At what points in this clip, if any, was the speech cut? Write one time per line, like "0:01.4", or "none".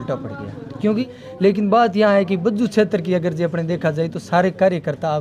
0:01.0